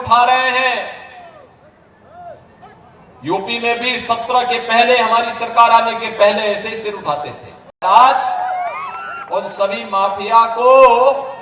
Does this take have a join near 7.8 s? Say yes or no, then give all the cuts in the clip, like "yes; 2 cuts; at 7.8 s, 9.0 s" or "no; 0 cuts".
yes; 1 cut; at 7.8 s